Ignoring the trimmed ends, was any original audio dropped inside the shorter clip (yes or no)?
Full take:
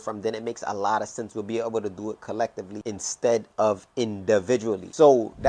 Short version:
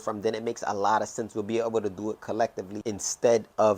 no